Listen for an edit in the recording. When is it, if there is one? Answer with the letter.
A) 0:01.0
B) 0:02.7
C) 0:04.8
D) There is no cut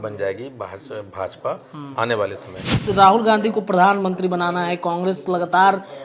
B